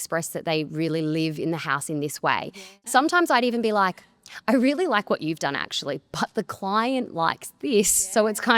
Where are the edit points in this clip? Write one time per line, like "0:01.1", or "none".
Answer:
0:02.7

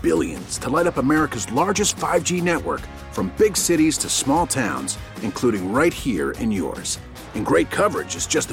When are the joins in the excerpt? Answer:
none

